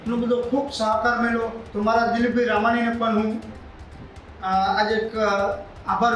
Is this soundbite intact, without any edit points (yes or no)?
no